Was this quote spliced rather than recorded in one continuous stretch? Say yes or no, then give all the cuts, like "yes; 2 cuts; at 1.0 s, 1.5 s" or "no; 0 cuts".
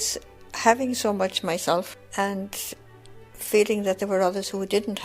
yes; 1 cut; at 2.0 s